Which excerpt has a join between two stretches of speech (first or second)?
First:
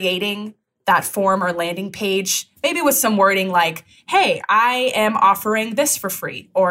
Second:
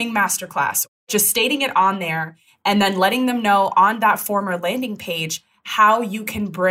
second